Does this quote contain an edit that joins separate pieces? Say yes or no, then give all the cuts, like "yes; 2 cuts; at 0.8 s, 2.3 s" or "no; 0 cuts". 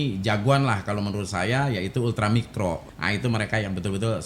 yes; 1 cut; at 2.9 s